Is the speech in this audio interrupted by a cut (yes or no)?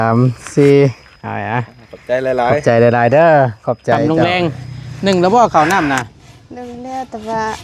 yes